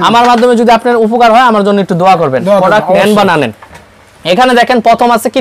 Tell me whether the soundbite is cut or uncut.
uncut